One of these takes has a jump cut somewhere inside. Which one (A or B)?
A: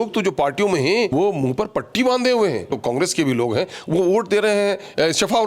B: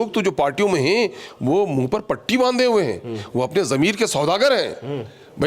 A